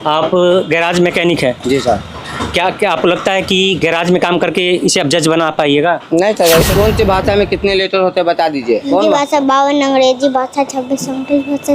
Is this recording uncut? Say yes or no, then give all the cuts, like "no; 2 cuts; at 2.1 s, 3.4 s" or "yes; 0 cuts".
no; 2 cuts; at 6.7 s, 8.9 s